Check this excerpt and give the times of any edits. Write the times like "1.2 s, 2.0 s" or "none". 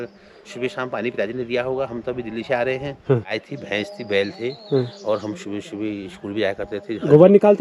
3.4 s